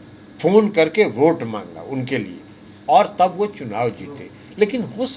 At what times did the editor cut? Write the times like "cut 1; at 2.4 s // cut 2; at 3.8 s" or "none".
none